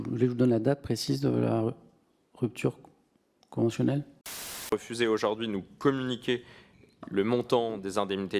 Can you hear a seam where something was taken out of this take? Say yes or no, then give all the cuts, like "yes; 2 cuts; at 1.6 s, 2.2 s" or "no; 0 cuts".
yes; 1 cut; at 4.7 s